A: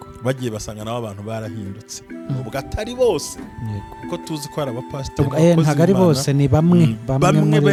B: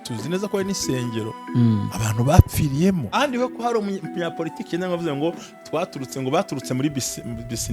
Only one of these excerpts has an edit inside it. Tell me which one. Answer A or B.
B